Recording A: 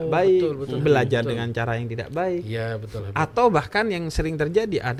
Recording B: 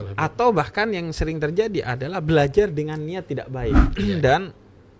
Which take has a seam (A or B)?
B